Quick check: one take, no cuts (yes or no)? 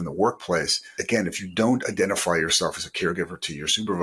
no